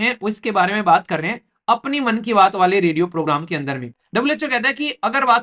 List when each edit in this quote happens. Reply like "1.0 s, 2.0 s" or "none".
4.0 s